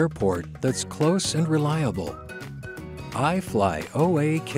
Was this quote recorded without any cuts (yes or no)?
yes